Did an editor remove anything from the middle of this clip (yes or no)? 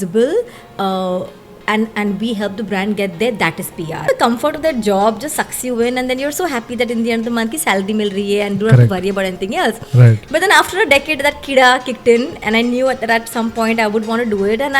yes